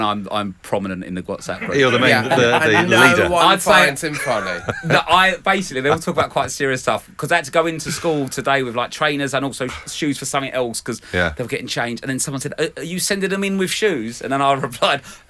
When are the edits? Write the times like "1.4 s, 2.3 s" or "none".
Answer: none